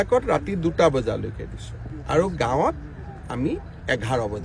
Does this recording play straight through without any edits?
yes; 0 cuts

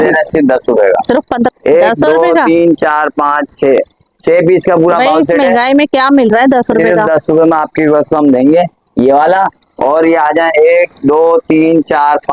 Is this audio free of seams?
no; 1 cut; at 1.5 s

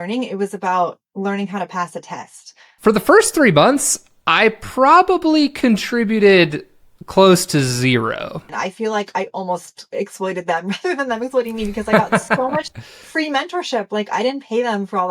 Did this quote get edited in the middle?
yes; 2 cuts; at 2.7 s, 8.4 s

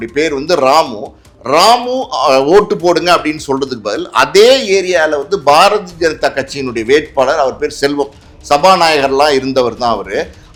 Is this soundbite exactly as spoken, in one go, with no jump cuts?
yes; 0 cuts

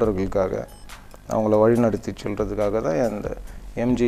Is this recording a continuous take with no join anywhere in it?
yes; 0 cuts

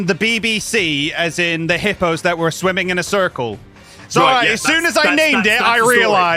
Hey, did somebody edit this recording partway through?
no; 0 cuts

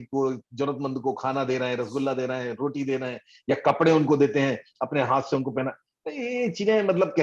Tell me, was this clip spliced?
no; 0 cuts

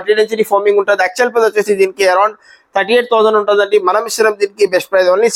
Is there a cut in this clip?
no; 0 cuts

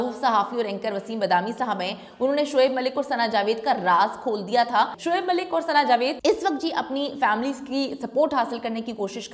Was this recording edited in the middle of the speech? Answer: yes; 2 cuts; at 5.0 s, 6.2 s

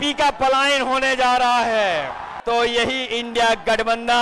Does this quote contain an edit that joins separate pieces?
yes; 1 cut; at 2.3 s

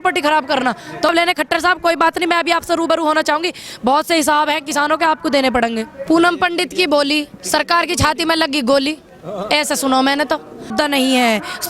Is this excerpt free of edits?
no; 3 cuts; at 1.1 s, 5.9 s, 10.7 s

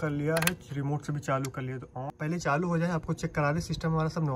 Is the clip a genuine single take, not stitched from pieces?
no; 1 cut; at 2.1 s

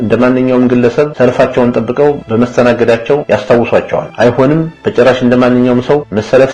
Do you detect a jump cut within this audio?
no; 0 cuts

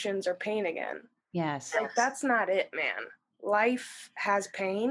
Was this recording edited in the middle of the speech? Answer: no; 0 cuts

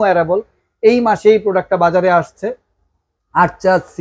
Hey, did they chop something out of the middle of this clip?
no; 0 cuts

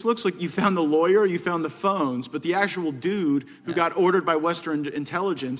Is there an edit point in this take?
no; 0 cuts

